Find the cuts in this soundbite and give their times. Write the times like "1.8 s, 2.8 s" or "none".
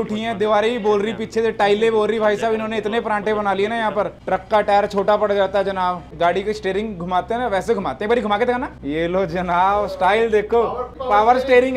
4.2 s, 6.1 s, 8.7 s, 10.9 s